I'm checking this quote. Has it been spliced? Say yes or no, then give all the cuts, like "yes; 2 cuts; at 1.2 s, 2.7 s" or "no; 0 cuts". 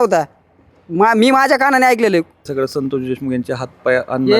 yes; 1 cut; at 2.5 s